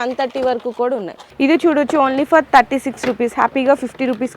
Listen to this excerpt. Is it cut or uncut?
cut